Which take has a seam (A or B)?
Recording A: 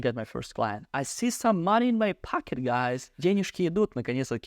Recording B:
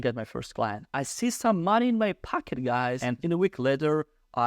B